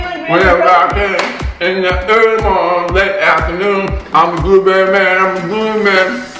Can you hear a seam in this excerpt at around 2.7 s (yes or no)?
no